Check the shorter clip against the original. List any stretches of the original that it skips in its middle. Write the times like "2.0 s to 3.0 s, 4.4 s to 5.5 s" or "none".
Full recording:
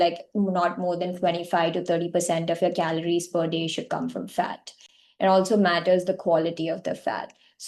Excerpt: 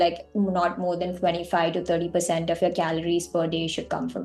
none

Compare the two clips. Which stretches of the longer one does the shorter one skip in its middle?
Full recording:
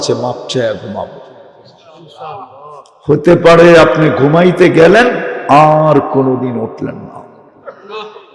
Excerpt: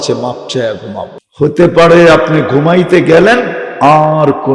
1.2 s to 2.9 s

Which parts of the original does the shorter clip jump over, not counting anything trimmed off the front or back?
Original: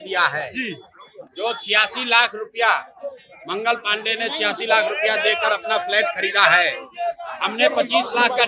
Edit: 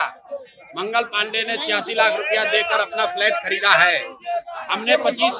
none

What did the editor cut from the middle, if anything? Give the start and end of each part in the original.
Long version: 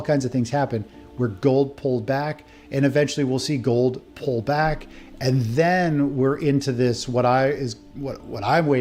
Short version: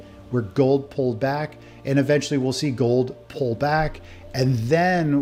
none

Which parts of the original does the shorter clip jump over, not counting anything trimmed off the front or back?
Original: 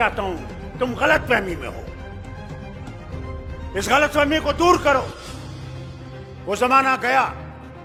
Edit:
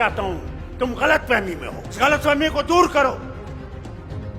2.0 s to 3.9 s

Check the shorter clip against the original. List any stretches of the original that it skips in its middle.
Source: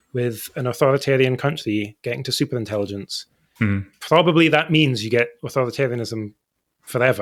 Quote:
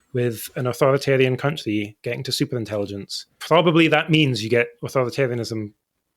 3.3 s to 3.9 s

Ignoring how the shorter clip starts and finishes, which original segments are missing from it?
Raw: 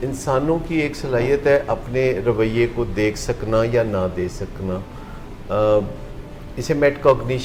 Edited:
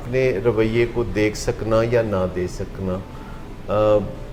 none

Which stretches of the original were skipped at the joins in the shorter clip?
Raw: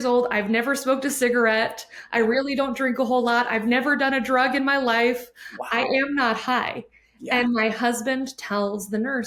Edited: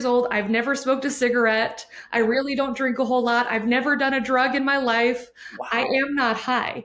none

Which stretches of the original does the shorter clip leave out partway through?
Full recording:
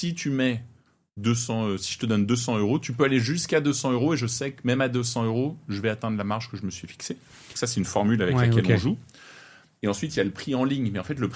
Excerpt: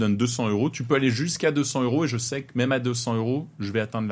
none

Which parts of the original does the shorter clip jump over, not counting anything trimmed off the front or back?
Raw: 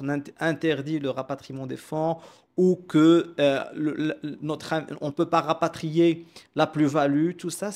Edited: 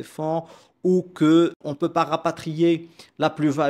3.3 s to 4.9 s

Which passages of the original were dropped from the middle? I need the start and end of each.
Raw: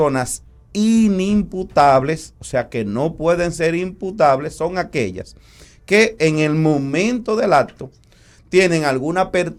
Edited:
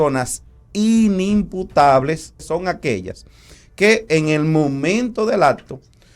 2.4 s to 4.5 s

